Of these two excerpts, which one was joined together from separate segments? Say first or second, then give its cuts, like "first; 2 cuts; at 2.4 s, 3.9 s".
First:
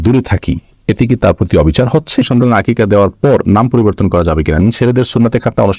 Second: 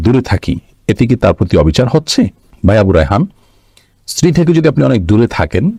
first; 2 cuts; at 2.3 s, 4.6 s